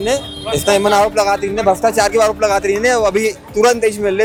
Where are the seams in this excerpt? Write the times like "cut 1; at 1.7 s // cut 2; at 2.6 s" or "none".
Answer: none